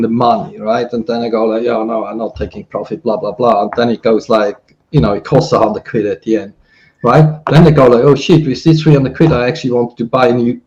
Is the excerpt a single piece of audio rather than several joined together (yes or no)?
yes